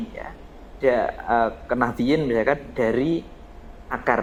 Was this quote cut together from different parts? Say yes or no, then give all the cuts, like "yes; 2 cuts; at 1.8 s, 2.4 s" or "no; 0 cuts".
no; 0 cuts